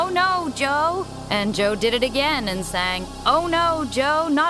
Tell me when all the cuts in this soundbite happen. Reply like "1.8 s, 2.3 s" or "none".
1.1 s, 3.0 s